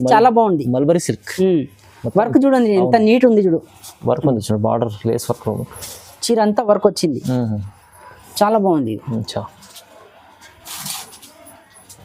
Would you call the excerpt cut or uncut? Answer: uncut